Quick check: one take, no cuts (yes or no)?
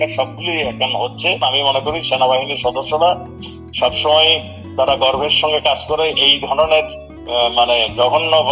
no